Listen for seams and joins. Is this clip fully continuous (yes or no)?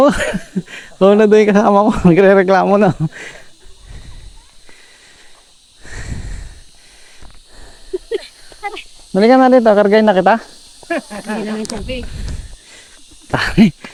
yes